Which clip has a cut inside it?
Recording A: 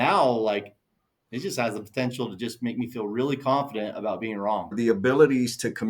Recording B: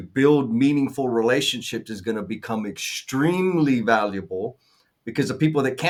A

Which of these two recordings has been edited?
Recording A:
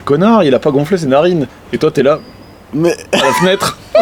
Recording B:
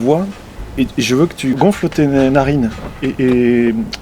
B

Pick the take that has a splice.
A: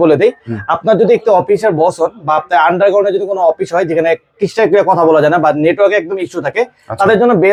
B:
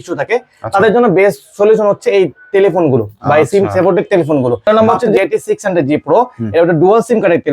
B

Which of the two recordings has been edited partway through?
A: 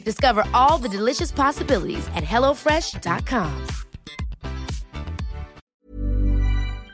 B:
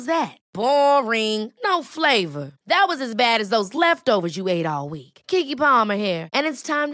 A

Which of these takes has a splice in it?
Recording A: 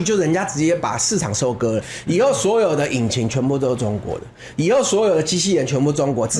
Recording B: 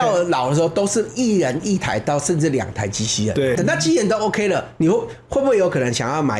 B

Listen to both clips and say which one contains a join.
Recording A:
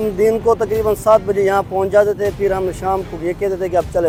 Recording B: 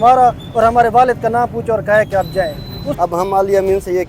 B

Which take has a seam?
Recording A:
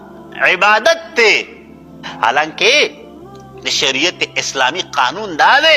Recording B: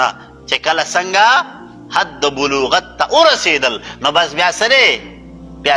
A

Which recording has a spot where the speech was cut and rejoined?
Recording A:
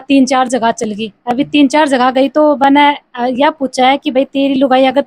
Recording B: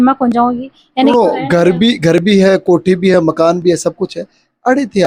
B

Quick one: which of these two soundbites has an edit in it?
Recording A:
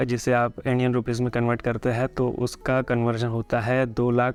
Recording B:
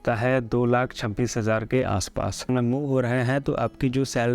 B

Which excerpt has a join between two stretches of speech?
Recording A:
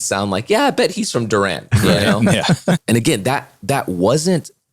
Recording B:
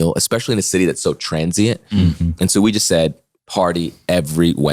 A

